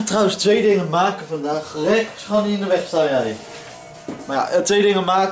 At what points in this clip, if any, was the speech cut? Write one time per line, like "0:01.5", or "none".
none